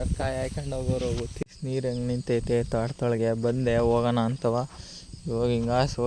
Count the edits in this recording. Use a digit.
1